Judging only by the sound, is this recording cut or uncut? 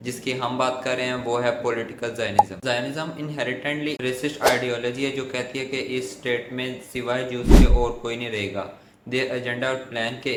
uncut